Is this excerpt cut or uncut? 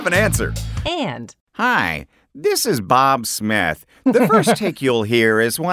cut